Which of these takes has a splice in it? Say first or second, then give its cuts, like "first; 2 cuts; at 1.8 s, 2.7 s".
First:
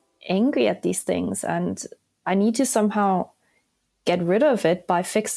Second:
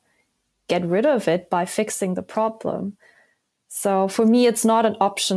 first; 1 cut; at 2.2 s